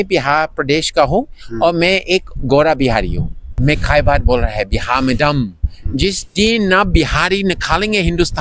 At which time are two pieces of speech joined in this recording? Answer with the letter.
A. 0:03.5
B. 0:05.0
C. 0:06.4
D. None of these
A